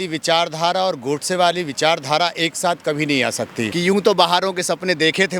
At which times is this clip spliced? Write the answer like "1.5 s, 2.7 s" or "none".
3.7 s